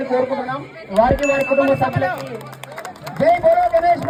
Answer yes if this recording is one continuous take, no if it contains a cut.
yes